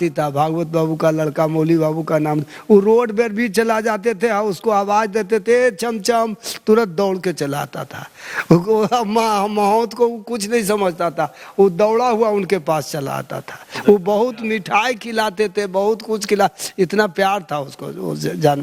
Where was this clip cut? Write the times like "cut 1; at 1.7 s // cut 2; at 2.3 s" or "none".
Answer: none